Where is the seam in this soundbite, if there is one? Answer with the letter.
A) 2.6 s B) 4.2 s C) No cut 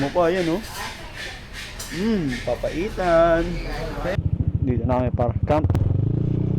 B